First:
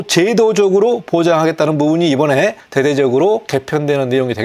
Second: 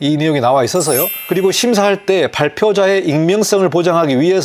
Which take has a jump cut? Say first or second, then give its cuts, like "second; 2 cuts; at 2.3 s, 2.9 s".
second; 1 cut; at 1.2 s